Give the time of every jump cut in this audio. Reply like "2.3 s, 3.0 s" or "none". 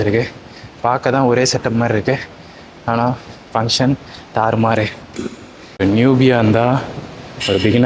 none